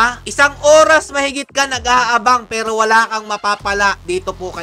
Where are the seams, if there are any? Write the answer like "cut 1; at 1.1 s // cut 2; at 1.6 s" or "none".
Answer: none